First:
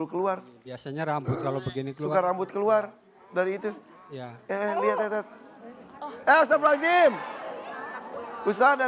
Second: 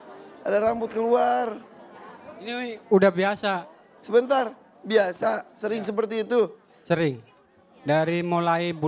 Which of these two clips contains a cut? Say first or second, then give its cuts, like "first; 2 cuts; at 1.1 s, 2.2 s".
first; 1 cut; at 7.4 s